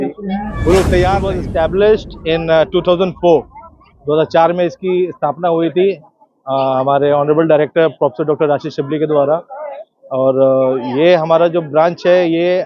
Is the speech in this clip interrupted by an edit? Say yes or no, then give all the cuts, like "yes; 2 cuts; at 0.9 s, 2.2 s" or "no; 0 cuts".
yes; 1 cut; at 1.4 s